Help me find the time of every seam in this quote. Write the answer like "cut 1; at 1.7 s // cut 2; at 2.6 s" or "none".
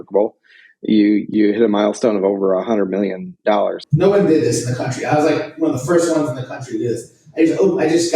cut 1; at 1.3 s // cut 2; at 3.8 s